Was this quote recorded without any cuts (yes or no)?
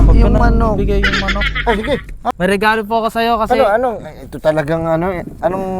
no